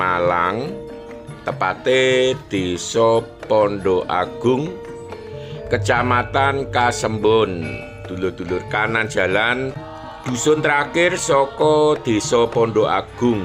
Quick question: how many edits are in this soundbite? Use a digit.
1